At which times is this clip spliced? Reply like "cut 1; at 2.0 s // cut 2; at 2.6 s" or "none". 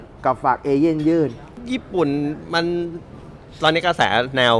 cut 1; at 1.6 s